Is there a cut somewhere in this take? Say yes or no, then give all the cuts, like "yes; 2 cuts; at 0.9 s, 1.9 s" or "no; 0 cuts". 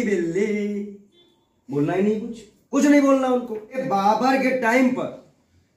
yes; 1 cut; at 3.8 s